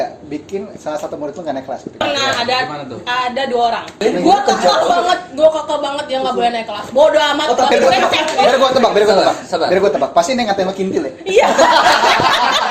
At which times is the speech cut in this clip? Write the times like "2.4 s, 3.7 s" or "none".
2.0 s, 3.9 s, 7.7 s